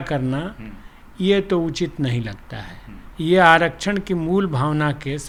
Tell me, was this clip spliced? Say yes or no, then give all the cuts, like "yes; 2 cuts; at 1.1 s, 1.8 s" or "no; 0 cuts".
no; 0 cuts